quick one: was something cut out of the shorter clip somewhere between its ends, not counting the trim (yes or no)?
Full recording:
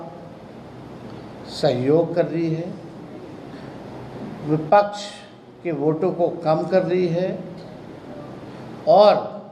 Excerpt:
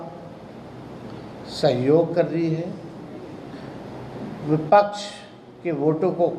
no